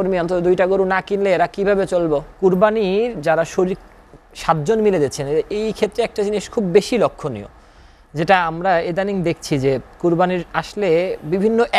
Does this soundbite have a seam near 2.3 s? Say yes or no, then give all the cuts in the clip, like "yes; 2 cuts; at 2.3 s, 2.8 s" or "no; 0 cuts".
yes; 1 cut; at 2.3 s